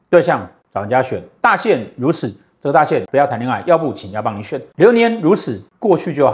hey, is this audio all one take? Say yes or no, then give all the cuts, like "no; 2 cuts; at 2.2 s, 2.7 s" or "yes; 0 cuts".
no; 1 cut; at 3.0 s